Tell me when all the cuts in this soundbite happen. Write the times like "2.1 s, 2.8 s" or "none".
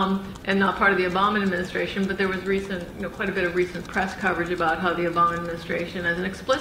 5.5 s